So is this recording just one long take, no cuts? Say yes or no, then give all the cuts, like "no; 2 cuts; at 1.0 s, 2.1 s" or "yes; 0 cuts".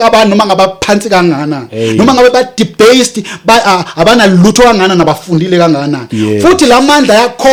yes; 0 cuts